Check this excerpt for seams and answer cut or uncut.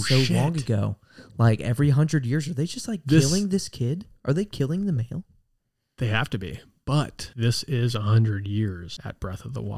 cut